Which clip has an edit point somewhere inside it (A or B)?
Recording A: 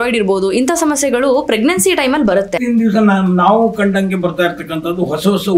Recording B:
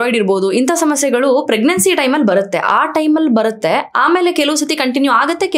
A